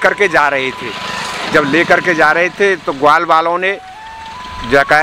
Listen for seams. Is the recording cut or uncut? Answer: uncut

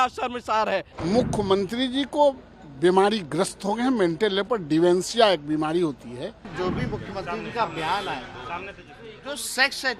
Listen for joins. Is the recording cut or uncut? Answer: cut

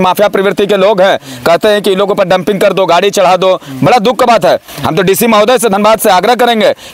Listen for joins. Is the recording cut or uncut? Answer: uncut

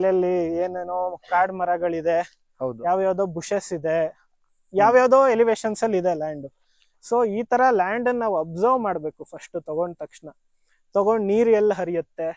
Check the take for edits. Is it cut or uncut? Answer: uncut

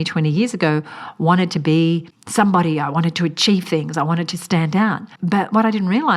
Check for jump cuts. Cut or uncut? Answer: cut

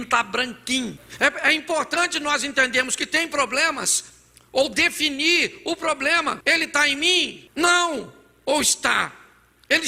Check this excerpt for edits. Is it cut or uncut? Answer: cut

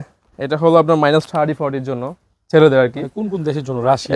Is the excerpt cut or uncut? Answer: uncut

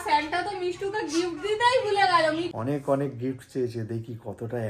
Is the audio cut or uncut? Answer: cut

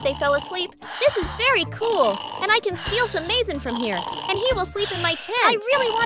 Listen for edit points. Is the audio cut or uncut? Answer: uncut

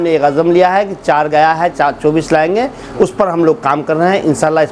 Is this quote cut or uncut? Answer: uncut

